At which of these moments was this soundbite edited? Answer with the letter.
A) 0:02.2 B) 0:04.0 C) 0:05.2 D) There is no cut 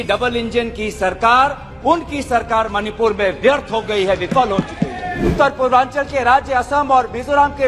C